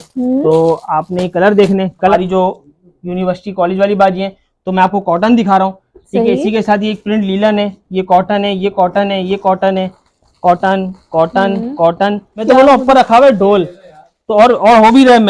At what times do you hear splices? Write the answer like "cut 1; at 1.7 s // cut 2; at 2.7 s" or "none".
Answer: cut 1; at 2.1 s // cut 2; at 12.3 s

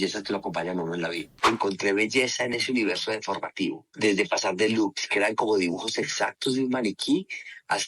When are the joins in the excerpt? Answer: cut 1; at 1.4 s // cut 2; at 3.9 s

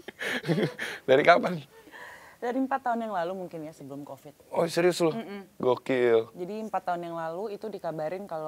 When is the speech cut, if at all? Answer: none

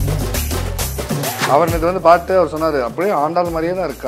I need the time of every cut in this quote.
cut 1; at 1.5 s

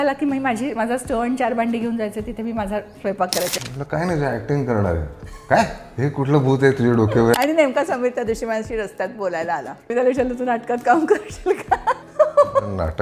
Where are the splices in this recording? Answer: cut 1; at 3.6 s // cut 2; at 7.0 s // cut 3; at 9.9 s // cut 4; at 12.1 s

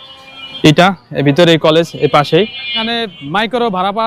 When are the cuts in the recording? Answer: cut 1; at 2.8 s

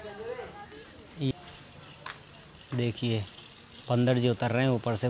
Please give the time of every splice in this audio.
cut 1; at 1.3 s

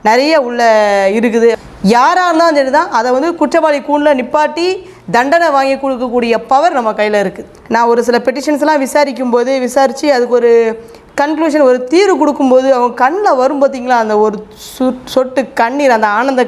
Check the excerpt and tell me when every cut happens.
cut 1; at 1.6 s // cut 2; at 7.5 s

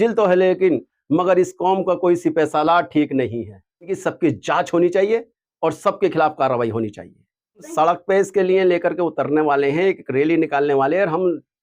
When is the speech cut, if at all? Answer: cut 1; at 3.9 s // cut 2; at 7.7 s

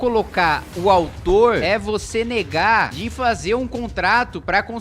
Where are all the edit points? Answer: cut 1; at 1.6 s // cut 2; at 3.0 s

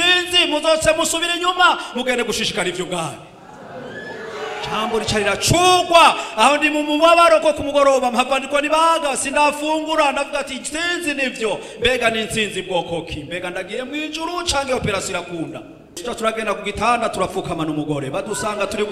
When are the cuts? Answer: cut 1; at 16.0 s

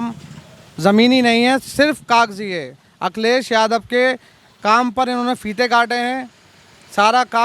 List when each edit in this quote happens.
none

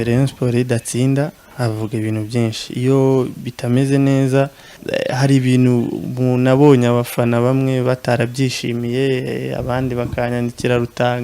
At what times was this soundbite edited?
cut 1; at 4.7 s

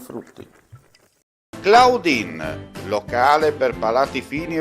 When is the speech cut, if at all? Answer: cut 1; at 0.9 s

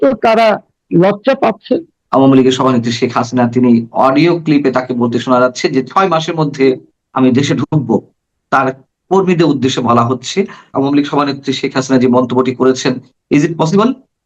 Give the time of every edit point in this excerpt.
cut 1; at 1.9 s // cut 2; at 7.1 s // cut 3; at 10.7 s

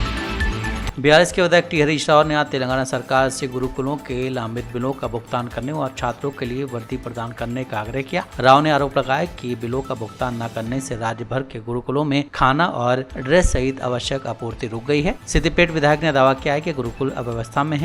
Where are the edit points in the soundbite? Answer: cut 1; at 0.9 s

